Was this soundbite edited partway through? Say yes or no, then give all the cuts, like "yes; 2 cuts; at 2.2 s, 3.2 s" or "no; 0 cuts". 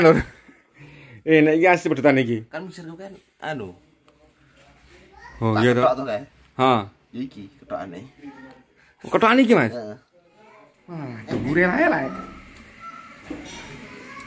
yes; 1 cut; at 11.1 s